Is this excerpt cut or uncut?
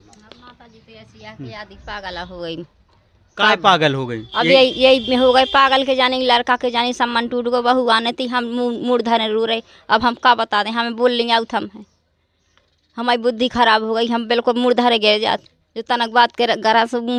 uncut